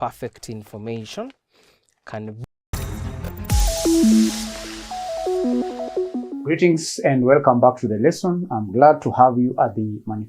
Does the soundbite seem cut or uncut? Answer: cut